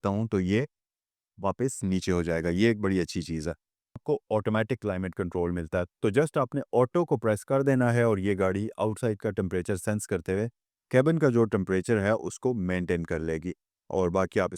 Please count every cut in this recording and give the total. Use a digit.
1